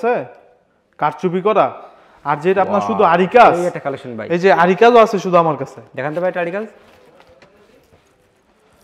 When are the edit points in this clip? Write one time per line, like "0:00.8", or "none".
none